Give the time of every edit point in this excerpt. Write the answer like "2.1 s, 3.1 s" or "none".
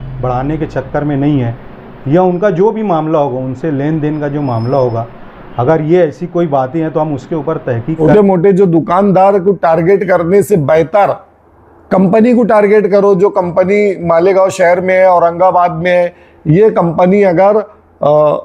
8.0 s